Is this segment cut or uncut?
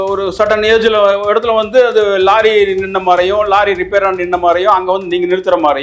uncut